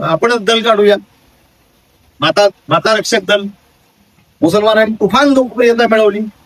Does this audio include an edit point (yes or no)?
no